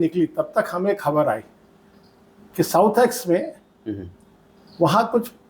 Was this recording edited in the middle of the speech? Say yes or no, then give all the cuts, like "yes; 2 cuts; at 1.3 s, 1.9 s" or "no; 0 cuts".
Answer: no; 0 cuts